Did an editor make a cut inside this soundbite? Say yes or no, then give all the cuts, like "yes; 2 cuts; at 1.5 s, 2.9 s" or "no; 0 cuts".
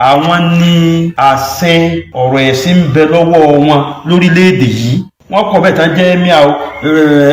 yes; 3 cuts; at 1.1 s, 2.1 s, 5.1 s